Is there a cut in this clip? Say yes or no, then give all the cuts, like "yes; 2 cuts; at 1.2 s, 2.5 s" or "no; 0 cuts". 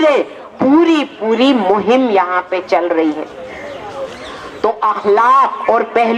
no; 0 cuts